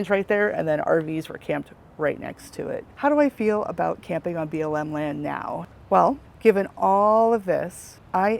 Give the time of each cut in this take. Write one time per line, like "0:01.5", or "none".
0:02.8
0:05.6